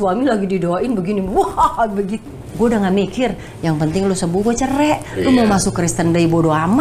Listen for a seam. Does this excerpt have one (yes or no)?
yes